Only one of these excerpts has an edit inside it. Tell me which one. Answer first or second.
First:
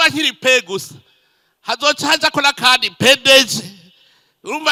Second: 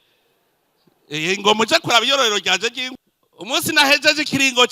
second